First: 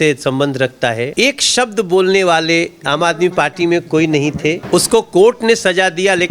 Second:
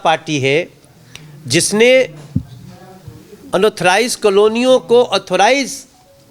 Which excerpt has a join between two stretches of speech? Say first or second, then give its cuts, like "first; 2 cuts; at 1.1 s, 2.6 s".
first; 2 cuts; at 1.1 s, 4.6 s